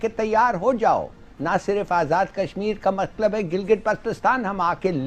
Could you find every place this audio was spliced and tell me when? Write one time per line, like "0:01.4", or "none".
none